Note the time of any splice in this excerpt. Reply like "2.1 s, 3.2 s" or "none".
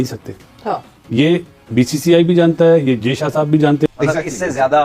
3.9 s

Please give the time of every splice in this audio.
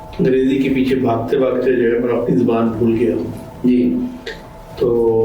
none

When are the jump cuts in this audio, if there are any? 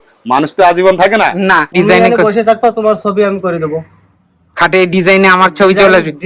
1.7 s

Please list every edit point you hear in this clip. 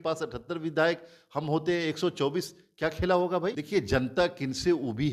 3.6 s

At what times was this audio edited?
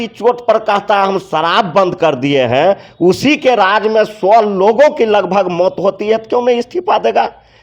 none

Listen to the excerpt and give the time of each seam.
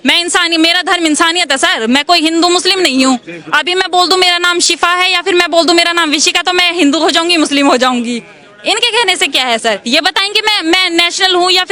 none

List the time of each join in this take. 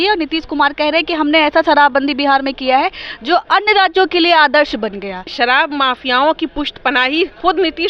5.3 s

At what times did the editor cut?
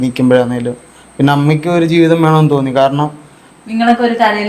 none

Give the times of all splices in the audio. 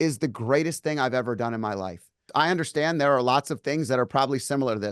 2.3 s

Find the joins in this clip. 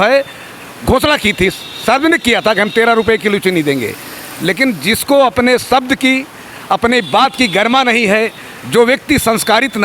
none

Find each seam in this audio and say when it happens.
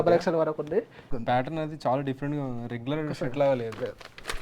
1.1 s

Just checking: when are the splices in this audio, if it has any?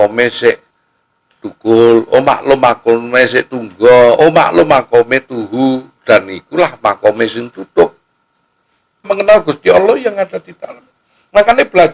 9.0 s

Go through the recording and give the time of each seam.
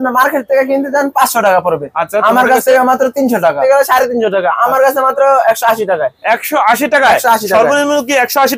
3.6 s

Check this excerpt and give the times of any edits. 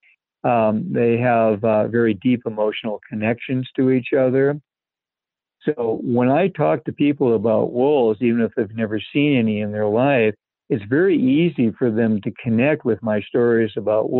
none

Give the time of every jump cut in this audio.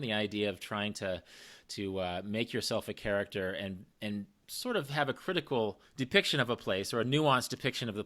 4.4 s, 5.8 s

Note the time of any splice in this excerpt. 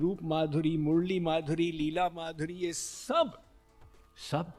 none

